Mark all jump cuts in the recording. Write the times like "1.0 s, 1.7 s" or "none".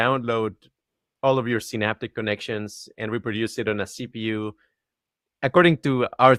none